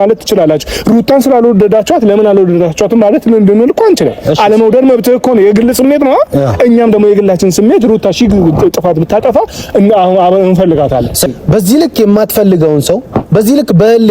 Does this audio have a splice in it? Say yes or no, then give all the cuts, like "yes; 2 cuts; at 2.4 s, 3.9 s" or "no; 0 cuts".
yes; 1 cut; at 11.3 s